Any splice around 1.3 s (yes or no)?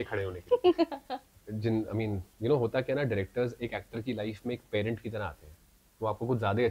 yes